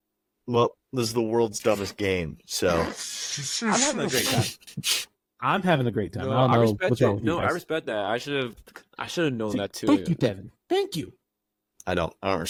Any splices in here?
no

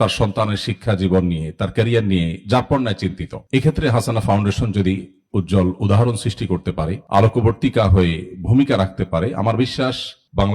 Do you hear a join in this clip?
no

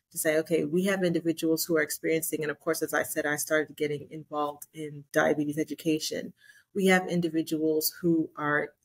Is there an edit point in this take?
yes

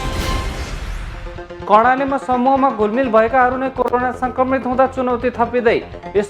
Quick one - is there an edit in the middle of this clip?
yes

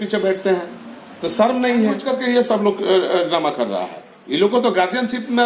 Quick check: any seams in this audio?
yes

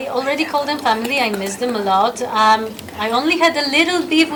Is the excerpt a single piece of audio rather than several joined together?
yes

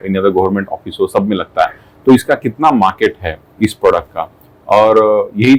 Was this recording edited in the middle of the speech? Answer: no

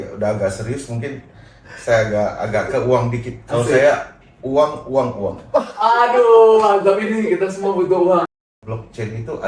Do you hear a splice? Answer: yes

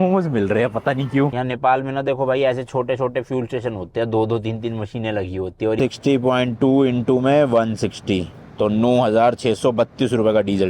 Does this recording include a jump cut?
yes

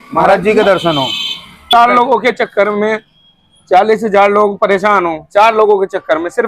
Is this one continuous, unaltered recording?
no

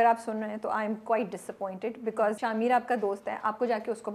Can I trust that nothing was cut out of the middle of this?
no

